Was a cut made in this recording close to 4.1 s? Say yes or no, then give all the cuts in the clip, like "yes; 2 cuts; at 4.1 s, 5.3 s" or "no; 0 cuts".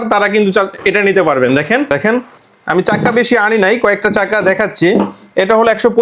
no; 1 cut; at 1.9 s